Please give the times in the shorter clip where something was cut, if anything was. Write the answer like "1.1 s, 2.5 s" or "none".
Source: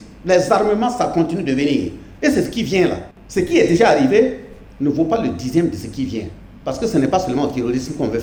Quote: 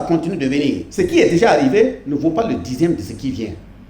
0.9 s, 2.0 s